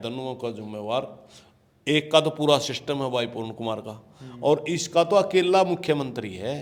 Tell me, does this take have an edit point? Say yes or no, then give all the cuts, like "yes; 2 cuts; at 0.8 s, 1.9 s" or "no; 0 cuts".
no; 0 cuts